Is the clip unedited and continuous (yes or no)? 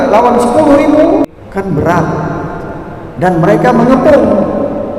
no